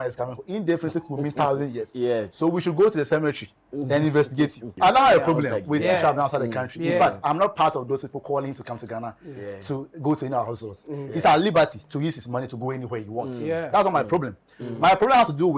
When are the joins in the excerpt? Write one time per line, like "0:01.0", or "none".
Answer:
0:04.7